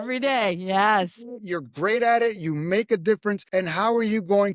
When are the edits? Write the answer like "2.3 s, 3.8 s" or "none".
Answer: 3.4 s

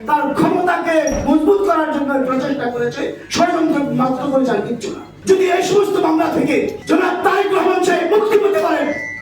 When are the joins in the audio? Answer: 5.1 s, 6.8 s

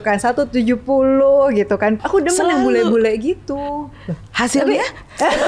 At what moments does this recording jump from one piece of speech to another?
2.0 s

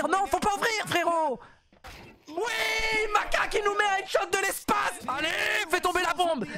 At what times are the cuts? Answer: 5.0 s

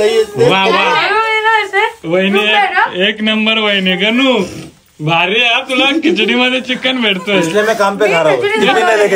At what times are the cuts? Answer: none

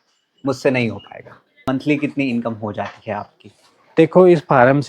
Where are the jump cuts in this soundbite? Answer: 1.7 s

